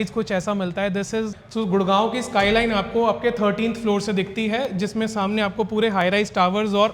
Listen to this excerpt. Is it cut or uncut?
cut